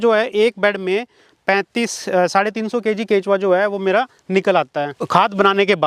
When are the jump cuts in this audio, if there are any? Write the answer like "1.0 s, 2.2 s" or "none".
5.0 s

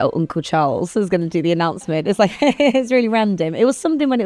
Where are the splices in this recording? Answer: none

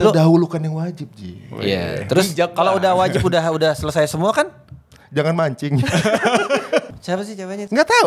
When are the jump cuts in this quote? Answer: 6.9 s

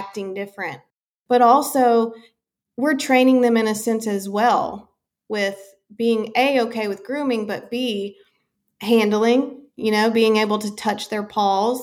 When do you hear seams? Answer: 0.9 s

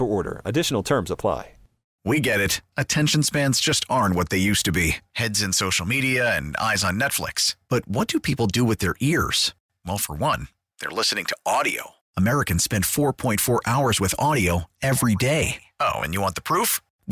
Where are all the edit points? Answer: 2.0 s

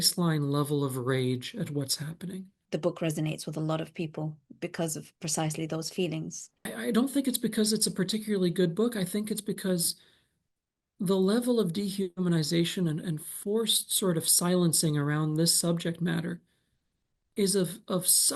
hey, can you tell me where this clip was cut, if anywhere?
2.6 s, 6.7 s

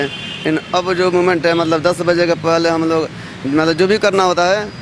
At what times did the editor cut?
none

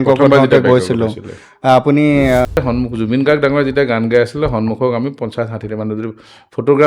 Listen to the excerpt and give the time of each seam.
2.5 s

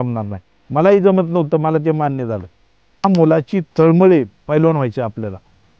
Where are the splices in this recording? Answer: 3.0 s

